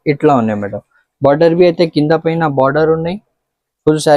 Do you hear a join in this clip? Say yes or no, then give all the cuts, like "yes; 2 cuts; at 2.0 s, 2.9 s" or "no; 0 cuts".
no; 0 cuts